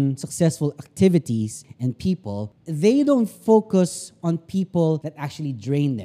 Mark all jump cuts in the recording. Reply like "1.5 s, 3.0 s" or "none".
1.6 s, 2.6 s, 5.1 s

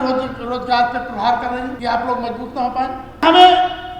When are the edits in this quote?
1.7 s, 3.2 s

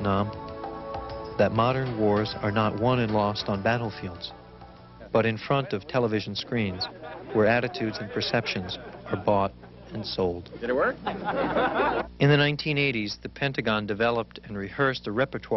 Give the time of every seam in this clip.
none

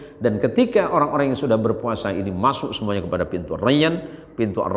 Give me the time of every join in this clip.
none

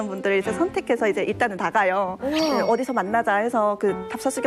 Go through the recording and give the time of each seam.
none

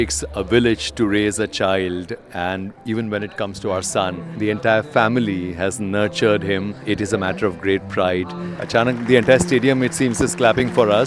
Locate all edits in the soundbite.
4.2 s, 6.8 s, 8.5 s

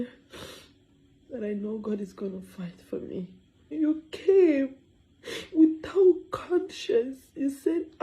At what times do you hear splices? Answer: 3.7 s

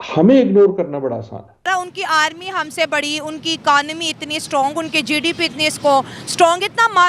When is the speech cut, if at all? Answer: 1.7 s

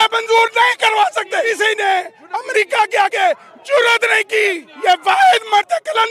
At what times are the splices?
1.5 s, 4.7 s

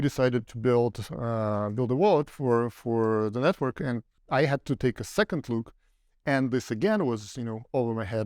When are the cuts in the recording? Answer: 4.1 s

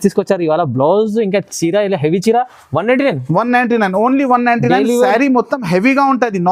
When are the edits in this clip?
none

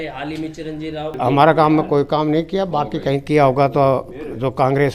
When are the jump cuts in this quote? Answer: 1.1 s

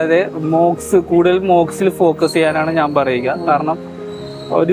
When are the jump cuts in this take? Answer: none

